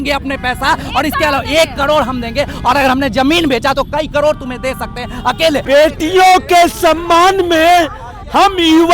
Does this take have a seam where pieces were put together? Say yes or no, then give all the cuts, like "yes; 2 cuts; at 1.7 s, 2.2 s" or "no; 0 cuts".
yes; 1 cut; at 5.6 s